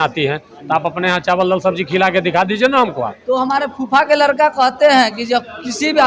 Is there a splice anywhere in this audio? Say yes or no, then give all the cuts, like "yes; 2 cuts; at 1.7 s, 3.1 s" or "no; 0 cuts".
yes; 1 cut; at 3.1 s